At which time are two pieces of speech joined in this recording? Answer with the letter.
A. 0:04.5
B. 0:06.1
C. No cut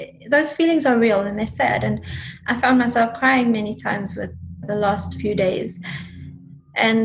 A